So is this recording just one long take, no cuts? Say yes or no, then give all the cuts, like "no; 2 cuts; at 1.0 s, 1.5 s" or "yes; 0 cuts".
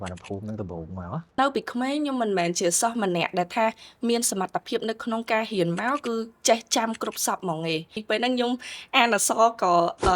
no; 2 cuts; at 1.4 s, 8.0 s